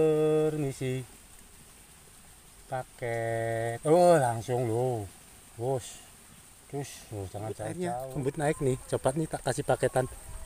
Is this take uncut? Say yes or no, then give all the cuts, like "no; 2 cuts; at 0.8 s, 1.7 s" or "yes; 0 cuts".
no; 1 cut; at 8.0 s